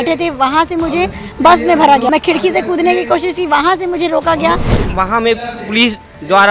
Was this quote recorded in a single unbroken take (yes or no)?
no